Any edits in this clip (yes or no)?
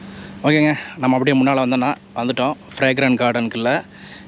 no